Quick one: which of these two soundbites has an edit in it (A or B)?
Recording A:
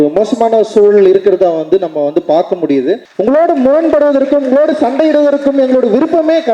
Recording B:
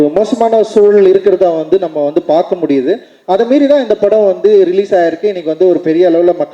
A